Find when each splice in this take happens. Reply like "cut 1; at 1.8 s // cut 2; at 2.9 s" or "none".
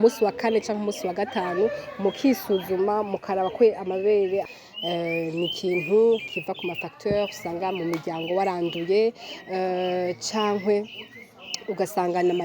cut 1; at 4.6 s